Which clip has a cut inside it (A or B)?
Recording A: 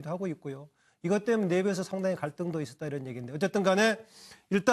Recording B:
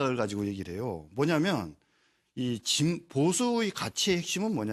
A